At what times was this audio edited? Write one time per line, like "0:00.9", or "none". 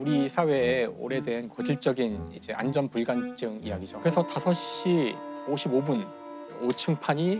0:03.9